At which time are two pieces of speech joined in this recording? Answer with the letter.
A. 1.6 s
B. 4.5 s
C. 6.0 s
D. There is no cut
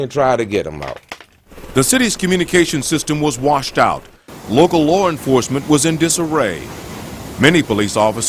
D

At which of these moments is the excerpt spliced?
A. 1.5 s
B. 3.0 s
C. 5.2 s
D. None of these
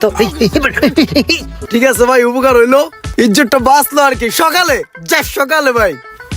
A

